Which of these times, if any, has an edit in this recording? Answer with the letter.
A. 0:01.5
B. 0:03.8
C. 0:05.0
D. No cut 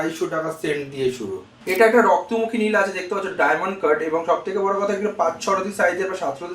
A